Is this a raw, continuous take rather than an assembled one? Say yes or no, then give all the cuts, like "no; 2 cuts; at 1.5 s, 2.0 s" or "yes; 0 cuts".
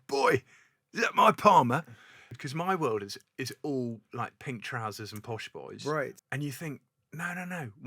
no; 2 cuts; at 2.4 s, 6.2 s